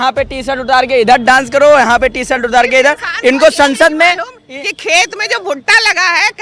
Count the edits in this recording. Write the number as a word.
zero